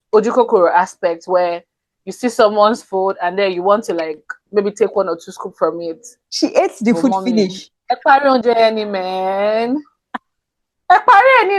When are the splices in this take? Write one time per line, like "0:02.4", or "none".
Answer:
none